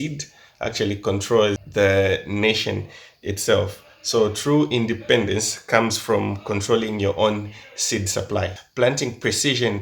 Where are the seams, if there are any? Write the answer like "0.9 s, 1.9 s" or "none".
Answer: 1.6 s, 8.6 s